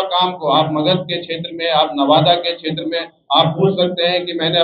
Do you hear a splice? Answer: no; 0 cuts

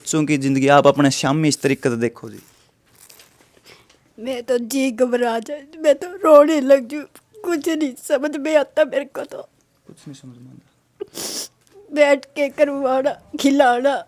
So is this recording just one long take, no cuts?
yes; 0 cuts

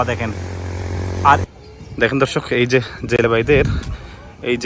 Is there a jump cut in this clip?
yes; 1 cut; at 1.4 s

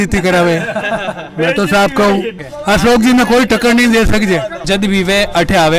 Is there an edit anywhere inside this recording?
yes; 2 cuts; at 2.3 s, 4.7 s

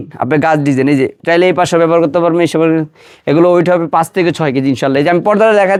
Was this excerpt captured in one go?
yes; 0 cuts

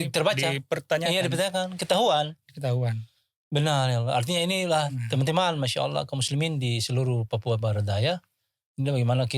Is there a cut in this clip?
no; 0 cuts

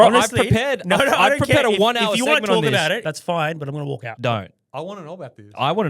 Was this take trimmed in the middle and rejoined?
yes; 2 cuts; at 3.0 s, 4.1 s

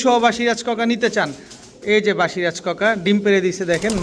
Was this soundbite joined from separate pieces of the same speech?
no; 0 cuts

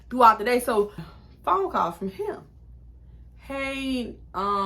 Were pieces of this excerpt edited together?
yes; 1 cut; at 1.0 s

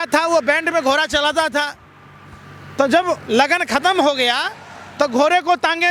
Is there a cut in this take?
no; 0 cuts

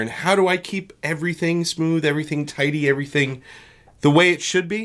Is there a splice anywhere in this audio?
no; 0 cuts

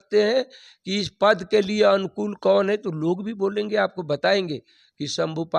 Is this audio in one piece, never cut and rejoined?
yes; 0 cuts

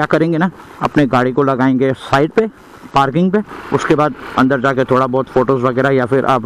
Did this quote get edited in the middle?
no; 0 cuts

